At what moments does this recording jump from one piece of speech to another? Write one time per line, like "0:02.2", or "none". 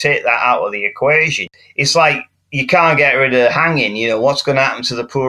0:01.5